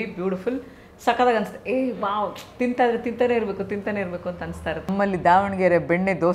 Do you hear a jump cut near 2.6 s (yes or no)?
no